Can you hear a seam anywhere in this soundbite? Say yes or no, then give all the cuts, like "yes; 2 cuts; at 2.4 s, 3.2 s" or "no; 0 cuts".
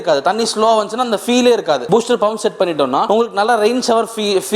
yes; 2 cuts; at 1.8 s, 3.0 s